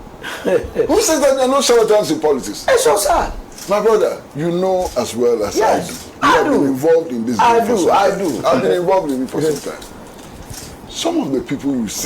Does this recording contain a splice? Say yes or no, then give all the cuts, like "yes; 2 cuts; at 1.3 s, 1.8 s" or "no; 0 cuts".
yes; 1 cut; at 3.0 s